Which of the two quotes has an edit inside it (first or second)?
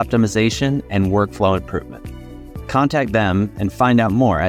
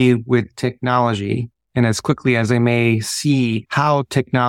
second